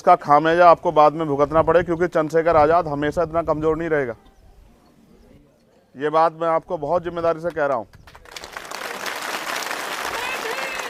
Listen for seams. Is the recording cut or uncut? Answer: uncut